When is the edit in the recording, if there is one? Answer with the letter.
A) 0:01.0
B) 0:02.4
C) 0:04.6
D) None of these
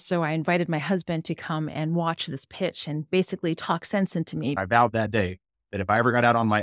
C